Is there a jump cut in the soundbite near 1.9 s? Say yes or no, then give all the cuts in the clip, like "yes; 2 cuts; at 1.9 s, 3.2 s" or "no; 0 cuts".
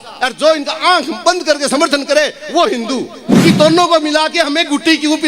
no; 1 cut; at 3.3 s